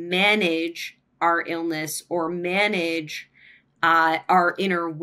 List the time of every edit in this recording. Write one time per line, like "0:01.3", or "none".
none